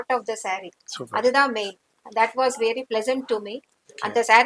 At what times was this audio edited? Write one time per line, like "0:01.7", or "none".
none